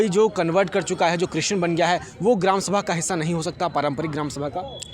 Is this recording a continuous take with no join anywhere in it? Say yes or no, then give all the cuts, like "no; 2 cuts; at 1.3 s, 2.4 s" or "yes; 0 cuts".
yes; 0 cuts